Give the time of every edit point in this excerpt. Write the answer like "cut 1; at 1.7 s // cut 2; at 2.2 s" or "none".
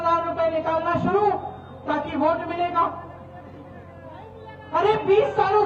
none